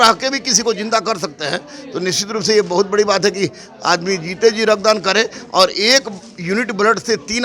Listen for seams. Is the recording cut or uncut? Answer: uncut